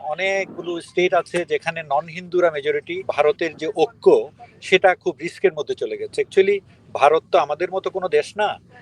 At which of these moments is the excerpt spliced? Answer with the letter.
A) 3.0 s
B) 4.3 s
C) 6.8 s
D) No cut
A